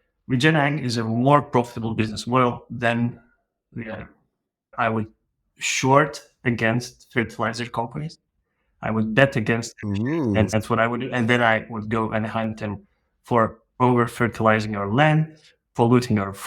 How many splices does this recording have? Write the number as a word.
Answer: one